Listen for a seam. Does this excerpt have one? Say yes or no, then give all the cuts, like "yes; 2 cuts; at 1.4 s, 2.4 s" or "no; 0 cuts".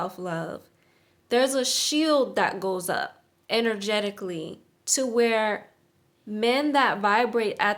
no; 0 cuts